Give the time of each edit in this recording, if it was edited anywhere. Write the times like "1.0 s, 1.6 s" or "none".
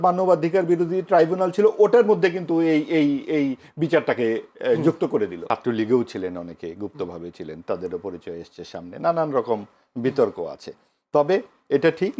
5.5 s